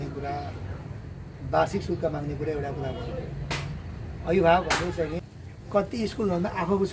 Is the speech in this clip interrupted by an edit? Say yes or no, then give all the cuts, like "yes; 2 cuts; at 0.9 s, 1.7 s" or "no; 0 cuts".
yes; 1 cut; at 5.2 s